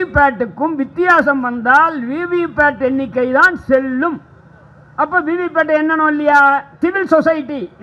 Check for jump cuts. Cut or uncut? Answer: cut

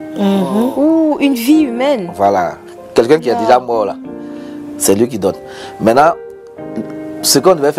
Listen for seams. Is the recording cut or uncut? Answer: uncut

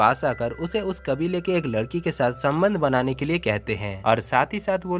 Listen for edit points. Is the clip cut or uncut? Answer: uncut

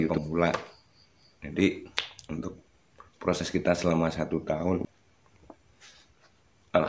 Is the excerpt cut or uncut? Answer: cut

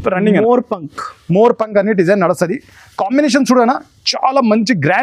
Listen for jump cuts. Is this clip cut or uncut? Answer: uncut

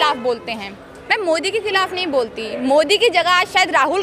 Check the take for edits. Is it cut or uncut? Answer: uncut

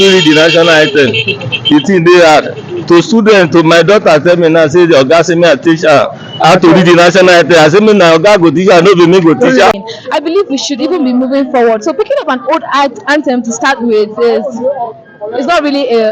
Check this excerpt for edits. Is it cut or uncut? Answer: cut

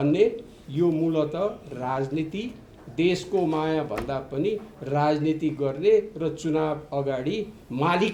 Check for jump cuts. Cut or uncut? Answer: uncut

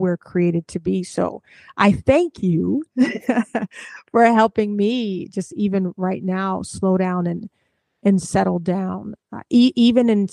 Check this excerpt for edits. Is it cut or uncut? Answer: uncut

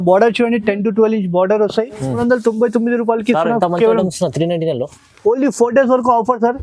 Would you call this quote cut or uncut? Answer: cut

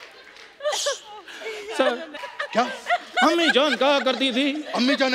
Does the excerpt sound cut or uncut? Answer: cut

